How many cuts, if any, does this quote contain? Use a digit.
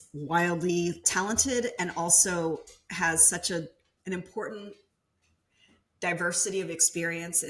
2